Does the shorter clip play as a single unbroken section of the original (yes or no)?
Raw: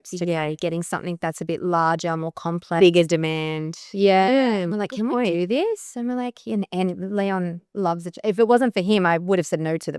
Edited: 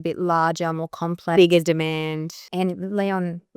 no